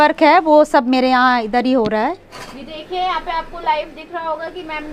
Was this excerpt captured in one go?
yes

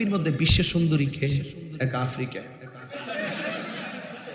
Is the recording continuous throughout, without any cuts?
no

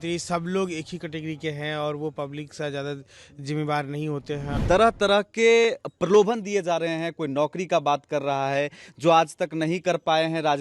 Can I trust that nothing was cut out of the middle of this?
no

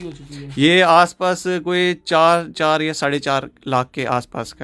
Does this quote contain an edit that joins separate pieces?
no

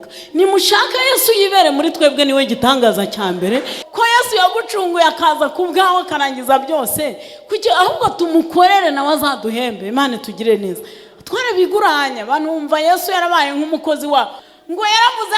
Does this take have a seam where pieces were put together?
yes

